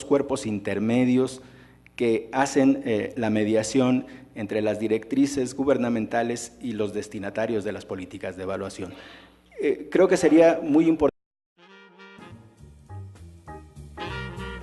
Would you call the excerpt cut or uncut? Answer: uncut